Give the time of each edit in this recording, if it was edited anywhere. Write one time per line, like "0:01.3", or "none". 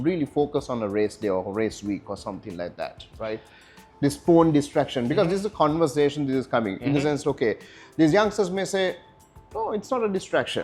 none